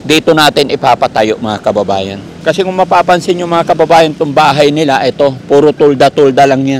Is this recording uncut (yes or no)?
no